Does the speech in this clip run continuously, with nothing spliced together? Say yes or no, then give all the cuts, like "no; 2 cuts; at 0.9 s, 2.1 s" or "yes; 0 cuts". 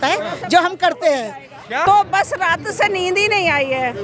no; 1 cut; at 1.8 s